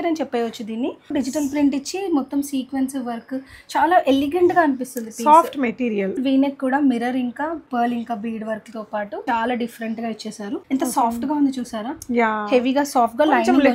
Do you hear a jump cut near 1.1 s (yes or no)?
yes